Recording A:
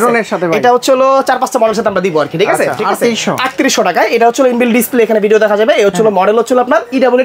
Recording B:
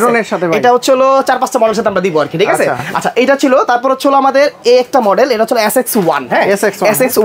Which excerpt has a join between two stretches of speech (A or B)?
A